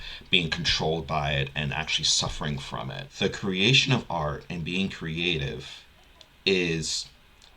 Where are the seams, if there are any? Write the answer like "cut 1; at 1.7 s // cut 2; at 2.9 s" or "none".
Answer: cut 1; at 3.1 s